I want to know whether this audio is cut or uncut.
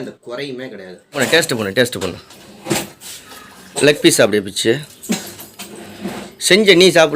cut